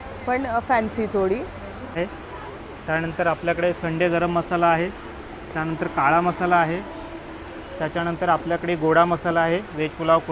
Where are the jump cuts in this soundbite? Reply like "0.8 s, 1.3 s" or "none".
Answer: 2.0 s